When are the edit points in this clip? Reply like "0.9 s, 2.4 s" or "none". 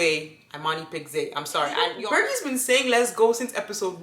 1.9 s